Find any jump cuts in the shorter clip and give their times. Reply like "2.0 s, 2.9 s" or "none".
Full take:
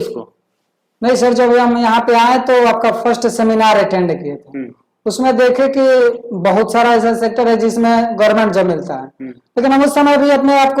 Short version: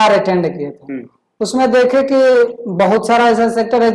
none